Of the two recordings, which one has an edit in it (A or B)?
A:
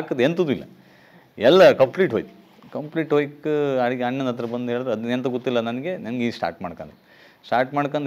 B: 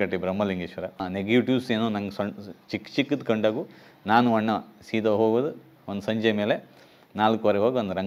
B